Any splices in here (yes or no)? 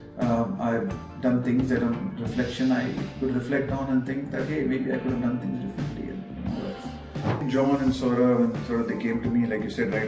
yes